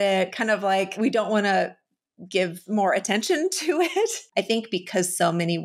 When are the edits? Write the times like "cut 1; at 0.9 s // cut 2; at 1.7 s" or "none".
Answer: cut 1; at 1.0 s // cut 2; at 4.2 s